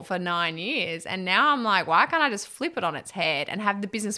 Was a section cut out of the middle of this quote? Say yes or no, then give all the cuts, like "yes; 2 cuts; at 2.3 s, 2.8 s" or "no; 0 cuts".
no; 0 cuts